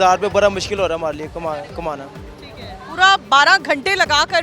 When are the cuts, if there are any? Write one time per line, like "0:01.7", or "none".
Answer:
none